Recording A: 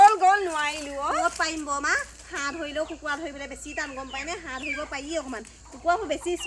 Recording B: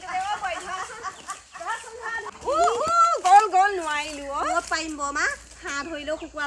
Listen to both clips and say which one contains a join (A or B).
B